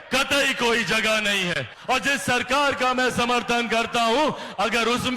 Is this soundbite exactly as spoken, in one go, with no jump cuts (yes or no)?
no